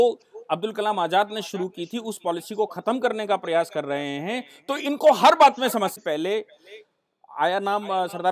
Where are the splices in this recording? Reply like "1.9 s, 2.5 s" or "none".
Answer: 6.0 s